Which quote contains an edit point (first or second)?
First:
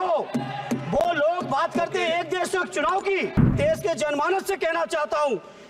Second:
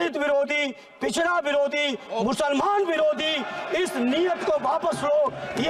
first